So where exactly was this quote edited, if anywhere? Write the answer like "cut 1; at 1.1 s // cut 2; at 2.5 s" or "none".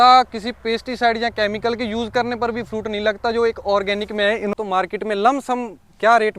cut 1; at 4.5 s